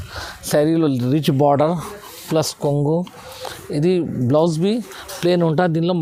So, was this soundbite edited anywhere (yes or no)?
no